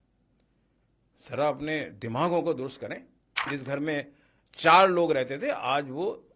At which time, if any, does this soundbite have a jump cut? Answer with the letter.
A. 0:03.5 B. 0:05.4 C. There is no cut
A